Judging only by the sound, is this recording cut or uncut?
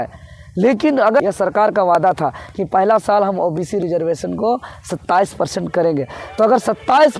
cut